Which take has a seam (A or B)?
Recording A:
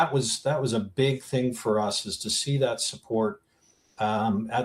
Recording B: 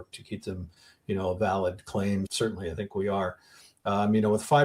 B